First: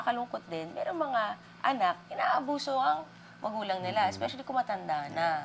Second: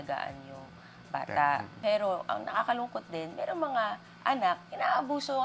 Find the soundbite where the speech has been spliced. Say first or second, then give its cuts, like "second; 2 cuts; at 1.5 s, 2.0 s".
second; 1 cut; at 1.7 s